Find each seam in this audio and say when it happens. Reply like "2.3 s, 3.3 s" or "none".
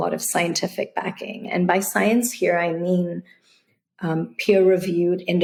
none